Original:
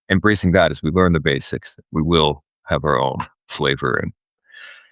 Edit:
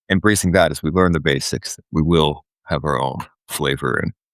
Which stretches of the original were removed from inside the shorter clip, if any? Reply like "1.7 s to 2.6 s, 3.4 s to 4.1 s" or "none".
none

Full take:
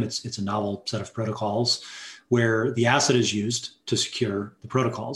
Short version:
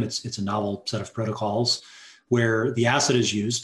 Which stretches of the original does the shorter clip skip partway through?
none

